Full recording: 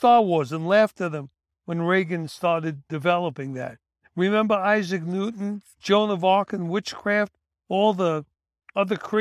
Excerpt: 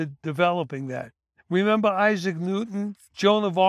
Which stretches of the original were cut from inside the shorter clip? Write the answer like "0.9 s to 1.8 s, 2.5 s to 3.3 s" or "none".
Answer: none